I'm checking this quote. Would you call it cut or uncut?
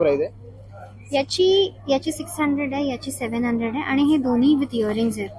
uncut